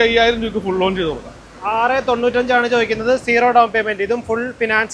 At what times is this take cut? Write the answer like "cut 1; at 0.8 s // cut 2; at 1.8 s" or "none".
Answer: none